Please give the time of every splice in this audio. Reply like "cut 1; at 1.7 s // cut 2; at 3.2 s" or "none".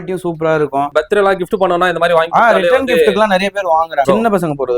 cut 1; at 0.9 s // cut 2; at 4.1 s